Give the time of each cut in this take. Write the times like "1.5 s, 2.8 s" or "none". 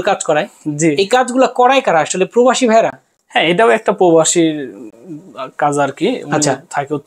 none